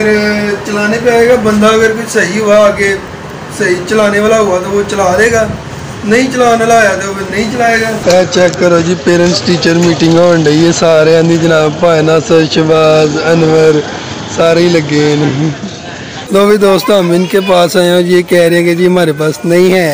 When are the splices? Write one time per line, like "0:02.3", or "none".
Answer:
0:08.0
0:16.3